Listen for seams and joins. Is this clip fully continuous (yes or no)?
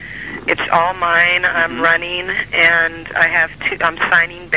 yes